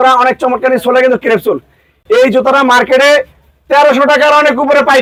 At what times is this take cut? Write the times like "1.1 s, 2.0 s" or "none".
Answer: none